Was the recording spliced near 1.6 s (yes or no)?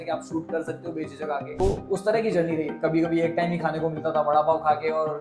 yes